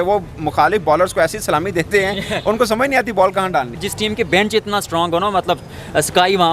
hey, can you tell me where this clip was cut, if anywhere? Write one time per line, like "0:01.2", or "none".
0:03.8